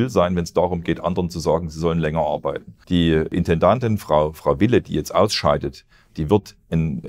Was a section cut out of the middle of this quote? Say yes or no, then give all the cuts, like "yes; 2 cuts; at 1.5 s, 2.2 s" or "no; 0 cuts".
yes; 1 cut; at 2.7 s